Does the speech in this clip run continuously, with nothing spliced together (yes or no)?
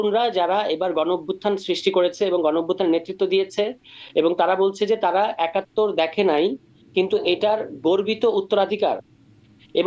yes